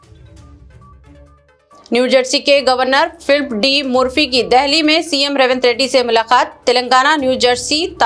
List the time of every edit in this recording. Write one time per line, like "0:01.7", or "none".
0:01.2